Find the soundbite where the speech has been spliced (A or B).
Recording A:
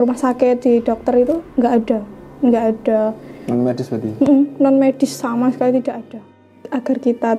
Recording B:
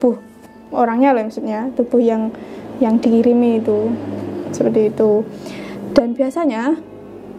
A